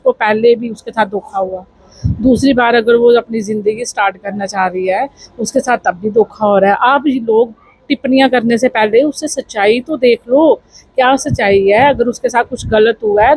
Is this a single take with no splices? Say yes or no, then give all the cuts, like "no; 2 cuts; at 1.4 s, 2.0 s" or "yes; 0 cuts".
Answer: yes; 0 cuts